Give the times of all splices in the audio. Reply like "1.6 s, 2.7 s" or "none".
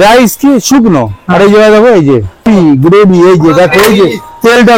2.4 s